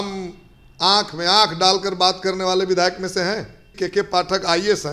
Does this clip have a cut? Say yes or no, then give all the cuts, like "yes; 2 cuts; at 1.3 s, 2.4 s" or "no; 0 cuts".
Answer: yes; 1 cut; at 3.7 s